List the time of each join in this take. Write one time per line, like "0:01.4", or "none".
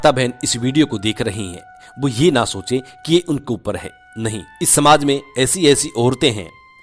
0:04.6